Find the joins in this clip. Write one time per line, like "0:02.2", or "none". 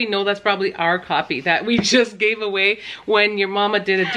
none